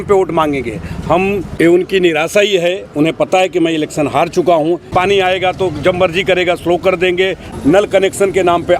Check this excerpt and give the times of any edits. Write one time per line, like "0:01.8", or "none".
0:01.5
0:04.8
0:07.5